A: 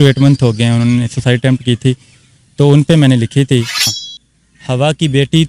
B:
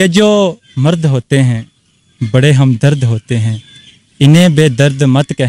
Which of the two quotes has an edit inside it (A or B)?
A